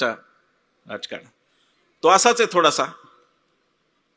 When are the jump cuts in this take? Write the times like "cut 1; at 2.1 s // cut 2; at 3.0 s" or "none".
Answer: none